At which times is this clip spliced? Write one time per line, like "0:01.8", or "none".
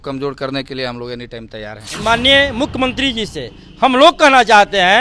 0:02.0